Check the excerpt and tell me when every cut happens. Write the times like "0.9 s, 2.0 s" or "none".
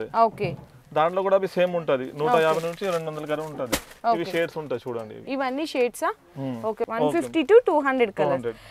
none